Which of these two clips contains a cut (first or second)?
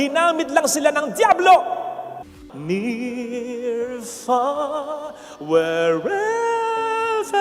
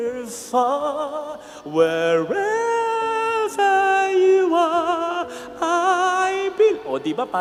first